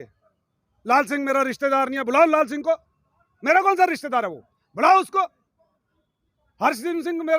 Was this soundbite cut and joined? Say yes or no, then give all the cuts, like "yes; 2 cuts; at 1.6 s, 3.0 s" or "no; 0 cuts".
no; 0 cuts